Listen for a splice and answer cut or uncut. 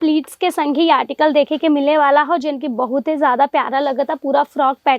uncut